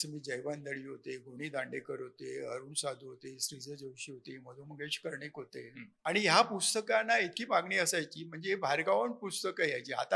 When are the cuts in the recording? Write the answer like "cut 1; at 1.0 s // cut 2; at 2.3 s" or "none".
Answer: cut 1; at 5.9 s